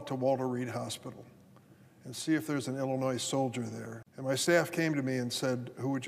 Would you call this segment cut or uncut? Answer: uncut